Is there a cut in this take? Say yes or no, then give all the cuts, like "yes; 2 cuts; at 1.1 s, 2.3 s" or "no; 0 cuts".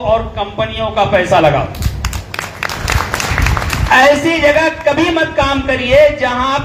no; 0 cuts